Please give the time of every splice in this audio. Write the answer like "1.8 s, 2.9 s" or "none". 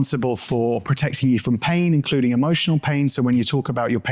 none